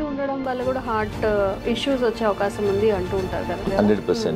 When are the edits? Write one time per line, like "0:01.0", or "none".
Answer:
0:01.6
0:03.6